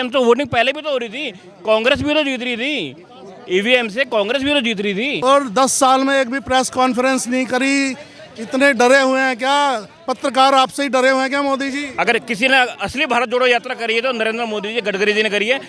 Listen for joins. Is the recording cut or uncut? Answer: cut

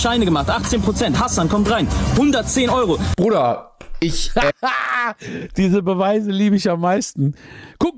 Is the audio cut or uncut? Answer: uncut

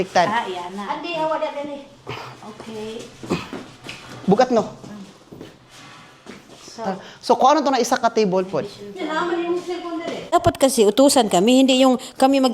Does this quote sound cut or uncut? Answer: cut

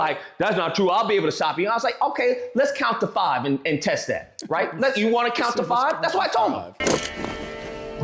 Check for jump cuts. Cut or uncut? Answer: uncut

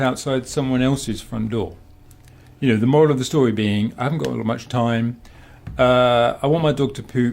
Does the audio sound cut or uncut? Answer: uncut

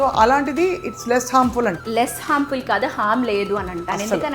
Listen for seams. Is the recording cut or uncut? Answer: cut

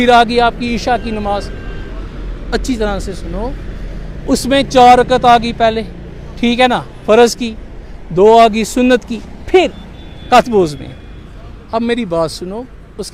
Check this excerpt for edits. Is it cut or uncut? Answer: uncut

